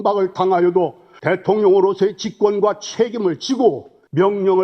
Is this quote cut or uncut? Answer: uncut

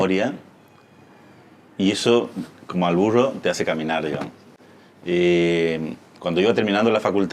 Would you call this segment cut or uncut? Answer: uncut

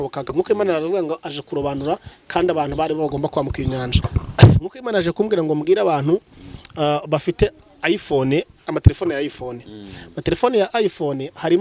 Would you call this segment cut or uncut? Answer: cut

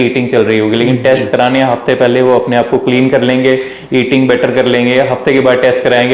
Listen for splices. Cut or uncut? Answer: uncut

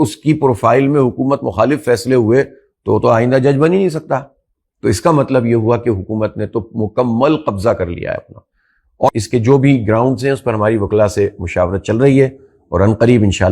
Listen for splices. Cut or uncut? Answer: cut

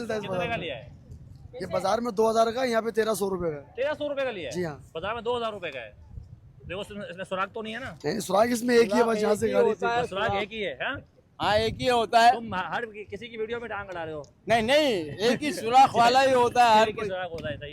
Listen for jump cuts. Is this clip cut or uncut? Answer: uncut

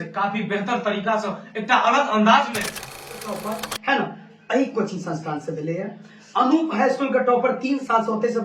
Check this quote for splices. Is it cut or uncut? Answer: cut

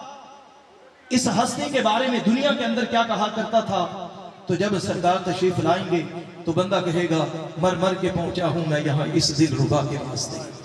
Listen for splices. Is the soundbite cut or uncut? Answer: uncut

